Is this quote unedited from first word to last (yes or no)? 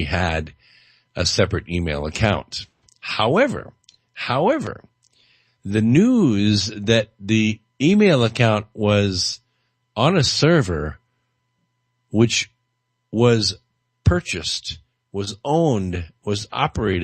no